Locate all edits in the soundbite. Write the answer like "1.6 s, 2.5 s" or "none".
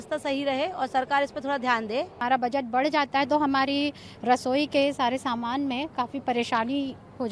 2.2 s